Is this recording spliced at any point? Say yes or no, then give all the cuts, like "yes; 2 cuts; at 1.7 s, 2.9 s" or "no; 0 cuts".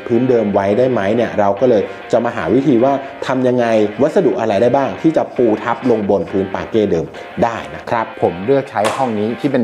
yes; 1 cut; at 8.1 s